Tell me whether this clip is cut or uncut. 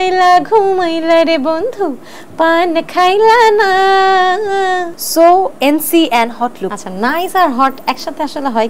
cut